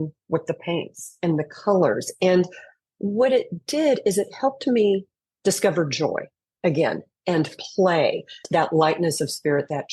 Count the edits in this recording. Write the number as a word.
one